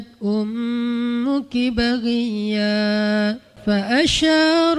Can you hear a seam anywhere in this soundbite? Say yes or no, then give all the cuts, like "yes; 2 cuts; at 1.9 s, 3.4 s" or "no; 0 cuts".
yes; 1 cut; at 3.5 s